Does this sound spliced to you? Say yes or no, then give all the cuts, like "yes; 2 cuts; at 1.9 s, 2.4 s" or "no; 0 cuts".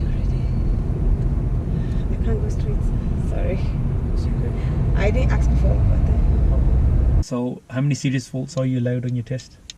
yes; 1 cut; at 7.2 s